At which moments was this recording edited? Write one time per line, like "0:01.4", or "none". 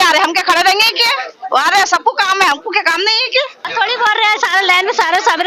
none